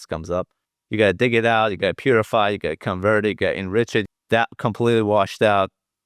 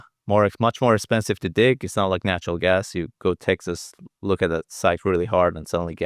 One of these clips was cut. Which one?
first; 1 cut; at 4.1 s

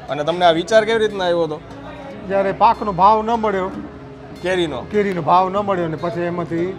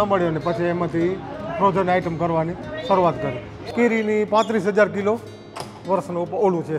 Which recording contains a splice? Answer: second; 1 cut; at 3.7 s

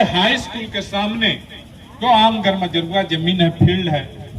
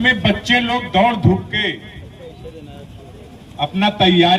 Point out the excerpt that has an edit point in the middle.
first; 1 cut; at 2.0 s

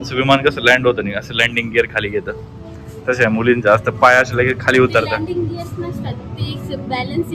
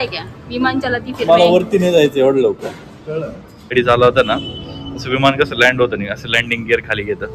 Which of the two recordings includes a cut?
second; 1 cut; at 3.7 s

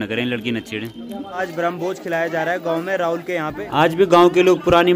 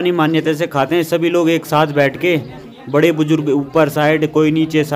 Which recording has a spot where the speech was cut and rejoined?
first; 2 cuts; at 1.5 s, 3.6 s

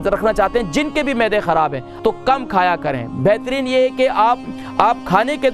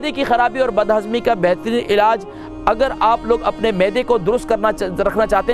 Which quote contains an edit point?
first; 1 cut; at 1.9 s

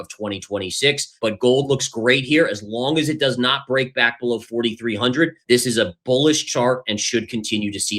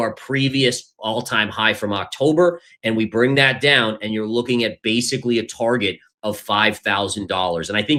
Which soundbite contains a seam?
first; 2 cuts; at 1.1 s, 5.4 s

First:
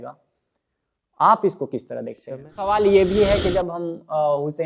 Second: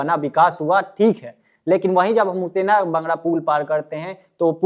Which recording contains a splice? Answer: first; 1 cut; at 2.7 s

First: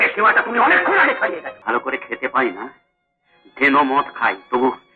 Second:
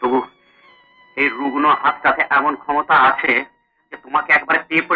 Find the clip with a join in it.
first; 1 cut; at 1.5 s

